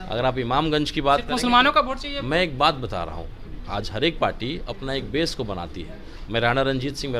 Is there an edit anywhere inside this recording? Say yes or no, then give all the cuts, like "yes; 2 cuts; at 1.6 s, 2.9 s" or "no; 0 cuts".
no; 0 cuts